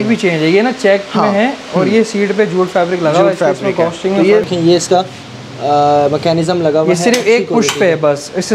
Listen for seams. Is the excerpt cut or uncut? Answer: cut